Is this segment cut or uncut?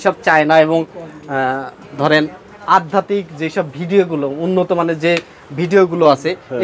uncut